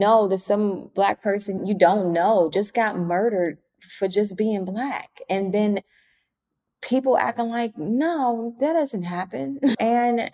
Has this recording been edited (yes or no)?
yes